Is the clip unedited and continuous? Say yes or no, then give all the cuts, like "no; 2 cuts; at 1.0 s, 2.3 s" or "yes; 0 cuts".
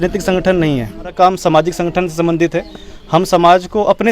no; 1 cut; at 1.1 s